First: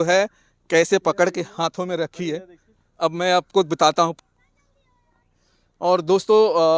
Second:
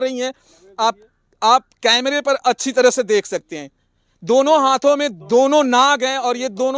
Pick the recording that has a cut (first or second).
first